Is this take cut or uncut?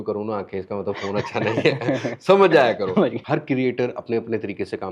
cut